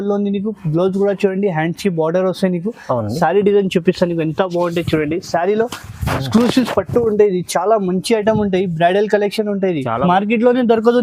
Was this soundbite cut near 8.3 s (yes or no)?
no